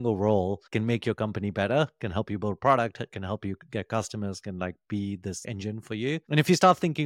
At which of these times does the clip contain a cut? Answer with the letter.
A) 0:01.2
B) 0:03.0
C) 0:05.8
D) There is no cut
D